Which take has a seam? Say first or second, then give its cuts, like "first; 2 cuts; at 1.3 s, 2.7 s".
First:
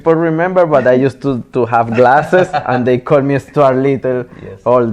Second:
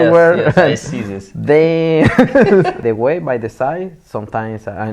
second; 1 cut; at 2.8 s